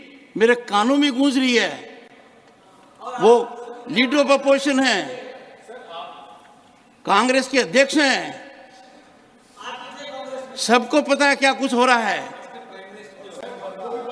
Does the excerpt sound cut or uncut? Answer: uncut